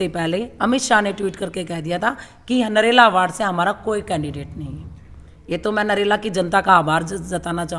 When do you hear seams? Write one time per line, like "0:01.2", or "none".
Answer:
none